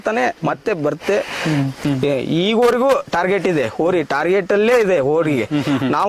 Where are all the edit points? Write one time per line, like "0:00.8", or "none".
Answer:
0:01.8